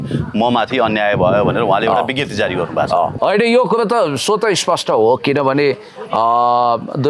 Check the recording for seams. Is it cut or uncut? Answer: cut